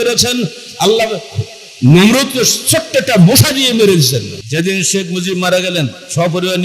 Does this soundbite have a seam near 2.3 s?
no; 1 cut; at 4.4 s

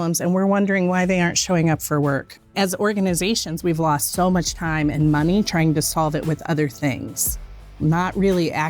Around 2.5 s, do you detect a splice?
yes; 2 cuts; at 2.5 s, 7.7 s

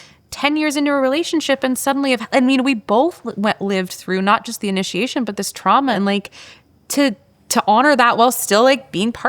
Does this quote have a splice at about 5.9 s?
yes; 1 cut; at 5.9 s

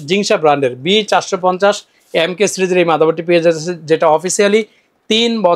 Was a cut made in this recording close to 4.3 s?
no; 0 cuts

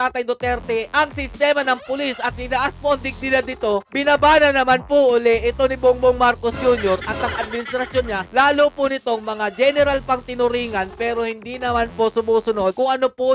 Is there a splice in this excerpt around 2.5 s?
no; 0 cuts

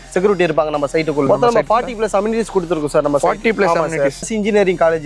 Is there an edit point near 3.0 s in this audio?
no; 2 cuts; at 1.3 s, 4.2 s

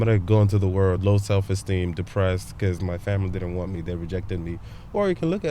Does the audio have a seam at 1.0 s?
yes; 1 cut; at 1.0 s

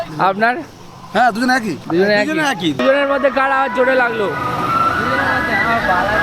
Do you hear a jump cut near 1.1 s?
no; 1 cut; at 2.8 s

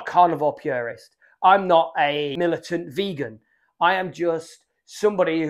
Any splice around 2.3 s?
yes; 1 cut; at 2.3 s

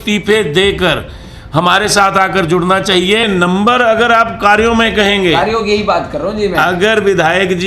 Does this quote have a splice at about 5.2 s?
no; 1 cut; at 3.2 s

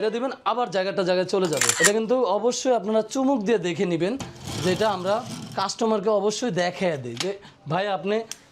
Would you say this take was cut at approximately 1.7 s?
yes; 1 cut; at 1.7 s

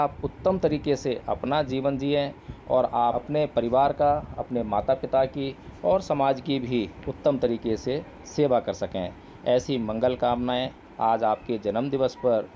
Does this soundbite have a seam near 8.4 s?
no; 1 cut; at 3.2 s

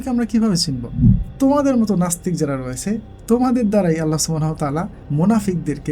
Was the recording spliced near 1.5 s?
no; 1 cut; at 5.0 s

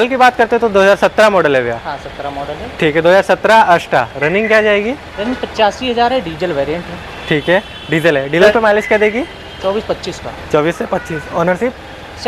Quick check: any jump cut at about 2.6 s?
no; 0 cuts

